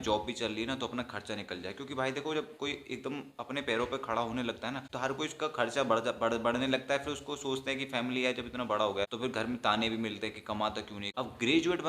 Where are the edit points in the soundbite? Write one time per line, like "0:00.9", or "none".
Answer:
0:04.9
0:09.1
0:11.0